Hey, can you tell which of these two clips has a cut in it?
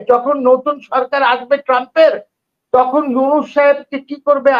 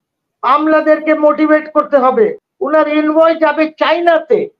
second; 1 cut; at 2.5 s

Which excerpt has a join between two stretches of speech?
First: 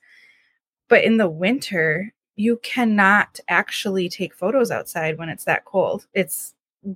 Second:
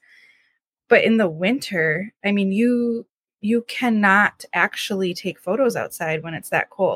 first; 1 cut; at 2.1 s

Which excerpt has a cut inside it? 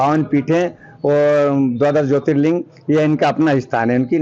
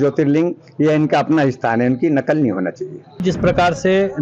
second; 1 cut; at 3.2 s

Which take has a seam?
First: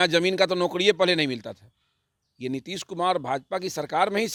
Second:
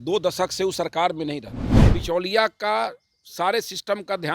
second; 1 cut; at 2.0 s

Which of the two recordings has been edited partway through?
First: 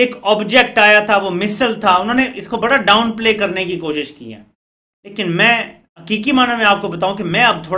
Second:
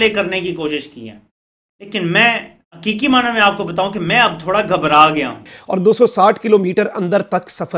second; 1 cut; at 5.5 s

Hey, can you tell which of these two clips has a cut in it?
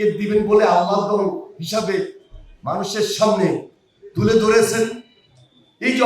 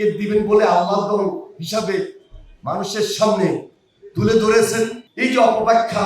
second; 1 cut; at 5.0 s

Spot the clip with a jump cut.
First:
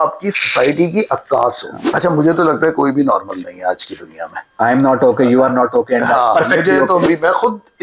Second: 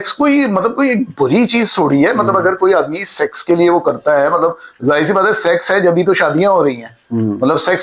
first; 2 cuts; at 1.9 s, 7.1 s

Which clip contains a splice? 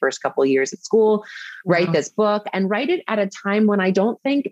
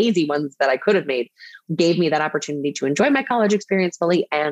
second; 1 cut; at 1.6 s

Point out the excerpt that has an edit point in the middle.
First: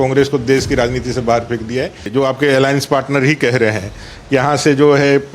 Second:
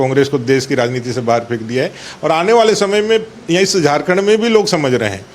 first; 1 cut; at 2.1 s

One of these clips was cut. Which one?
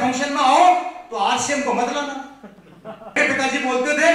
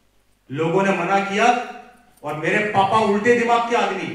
first; 1 cut; at 3.2 s

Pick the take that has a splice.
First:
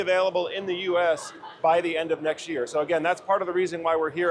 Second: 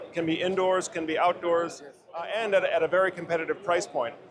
second; 1 cut; at 1.7 s

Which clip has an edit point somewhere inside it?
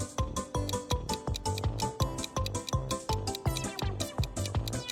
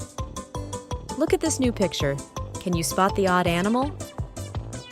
second; 2 cuts; at 1.2 s, 3.9 s

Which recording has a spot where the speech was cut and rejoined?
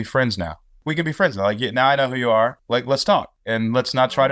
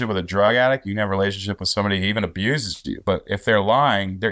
first; 3 cuts; at 0.8 s, 2.6 s, 3.4 s

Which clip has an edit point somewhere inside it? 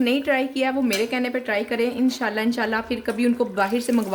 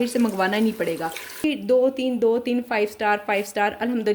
second; 1 cut; at 1.4 s

